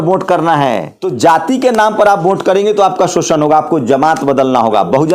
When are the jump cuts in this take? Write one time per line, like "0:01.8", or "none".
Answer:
0:01.0